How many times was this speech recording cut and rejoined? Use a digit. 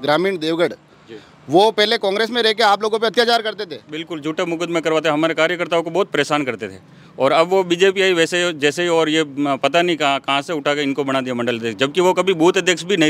0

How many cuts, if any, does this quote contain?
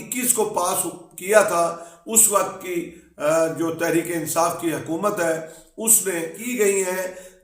1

